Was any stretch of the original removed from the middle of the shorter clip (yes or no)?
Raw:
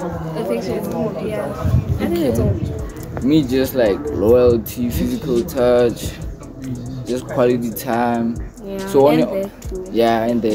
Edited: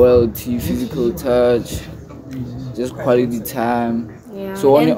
no